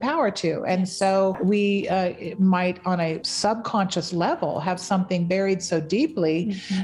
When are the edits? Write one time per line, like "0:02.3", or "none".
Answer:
0:01.4
0:03.3